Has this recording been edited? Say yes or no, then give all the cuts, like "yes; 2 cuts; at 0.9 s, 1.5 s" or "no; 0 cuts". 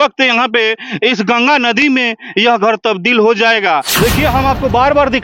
yes; 1 cut; at 4.0 s